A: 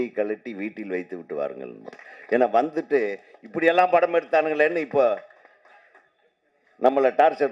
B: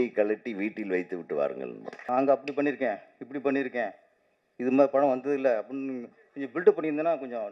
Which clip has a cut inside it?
B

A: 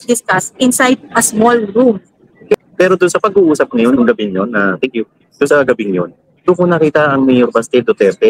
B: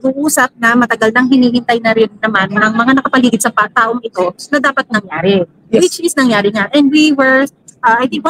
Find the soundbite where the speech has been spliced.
A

